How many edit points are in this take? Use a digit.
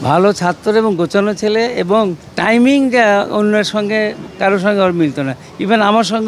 2